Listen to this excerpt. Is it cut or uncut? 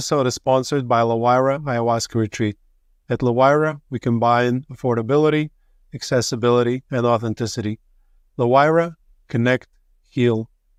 uncut